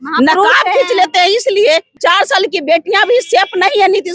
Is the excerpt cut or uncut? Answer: cut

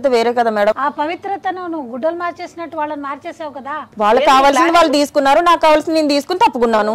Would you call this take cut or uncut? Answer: cut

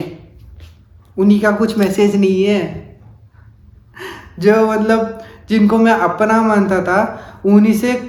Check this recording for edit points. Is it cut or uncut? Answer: uncut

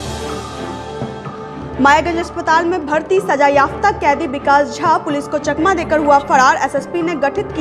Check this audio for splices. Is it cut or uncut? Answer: cut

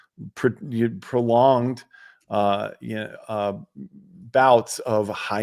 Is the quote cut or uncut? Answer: uncut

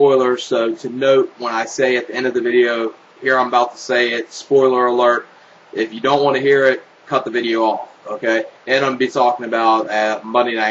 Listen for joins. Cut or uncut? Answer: uncut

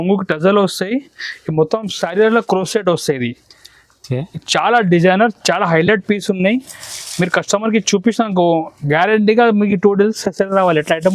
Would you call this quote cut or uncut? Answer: uncut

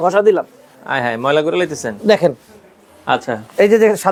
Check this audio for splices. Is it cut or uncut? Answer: uncut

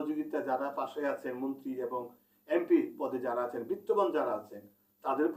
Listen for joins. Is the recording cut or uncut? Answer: uncut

